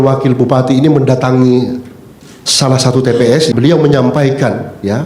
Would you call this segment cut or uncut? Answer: cut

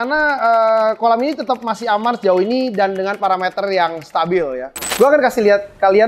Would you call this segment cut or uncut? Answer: cut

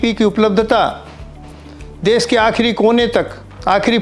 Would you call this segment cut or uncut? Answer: uncut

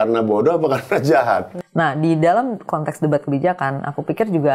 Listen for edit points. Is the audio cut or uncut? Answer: cut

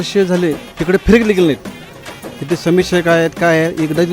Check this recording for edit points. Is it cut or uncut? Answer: cut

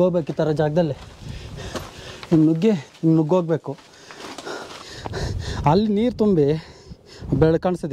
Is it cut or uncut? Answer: cut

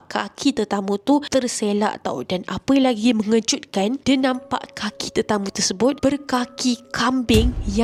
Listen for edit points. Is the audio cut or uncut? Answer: uncut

